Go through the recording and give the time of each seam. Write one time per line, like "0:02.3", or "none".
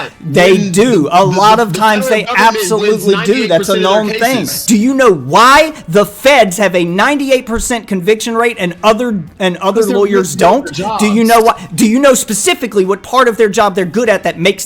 0:04.6